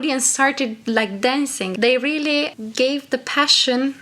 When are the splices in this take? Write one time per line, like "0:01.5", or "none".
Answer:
0:01.6
0:02.5

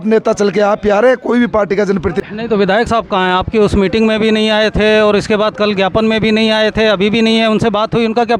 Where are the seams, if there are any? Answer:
0:02.2

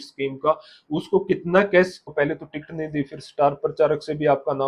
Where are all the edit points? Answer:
0:02.0

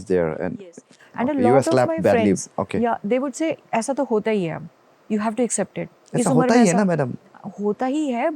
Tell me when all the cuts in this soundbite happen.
none

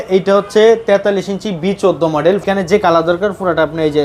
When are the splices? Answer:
0:02.4

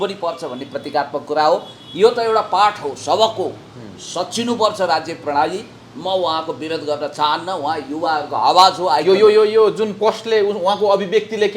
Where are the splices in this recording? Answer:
none

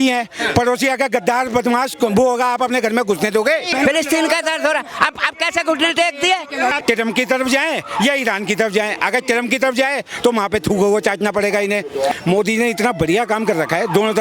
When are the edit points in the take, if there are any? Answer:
0:03.7
0:06.8
0:12.1

